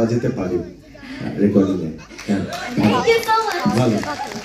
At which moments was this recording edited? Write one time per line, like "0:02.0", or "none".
none